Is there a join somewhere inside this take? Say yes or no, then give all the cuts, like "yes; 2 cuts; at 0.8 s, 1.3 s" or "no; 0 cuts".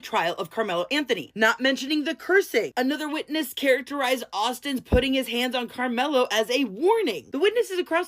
yes; 1 cut; at 1.2 s